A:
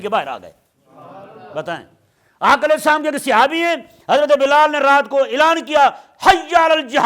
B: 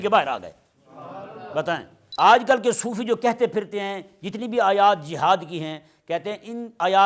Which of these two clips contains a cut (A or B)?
B